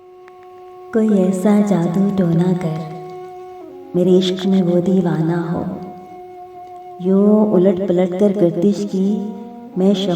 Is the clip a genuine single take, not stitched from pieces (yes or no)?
no